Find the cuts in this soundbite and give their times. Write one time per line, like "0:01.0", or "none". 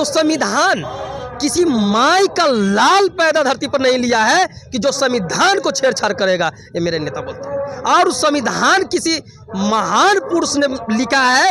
none